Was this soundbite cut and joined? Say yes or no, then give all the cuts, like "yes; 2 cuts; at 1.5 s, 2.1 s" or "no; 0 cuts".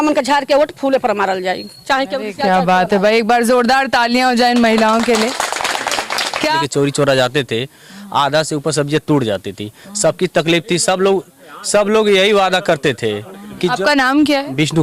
yes; 1 cut; at 6.6 s